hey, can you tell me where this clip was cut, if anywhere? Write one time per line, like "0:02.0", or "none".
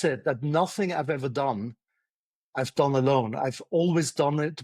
none